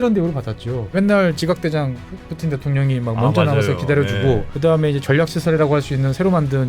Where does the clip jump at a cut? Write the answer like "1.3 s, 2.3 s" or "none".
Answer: 0.9 s